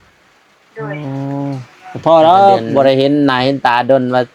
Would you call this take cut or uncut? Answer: cut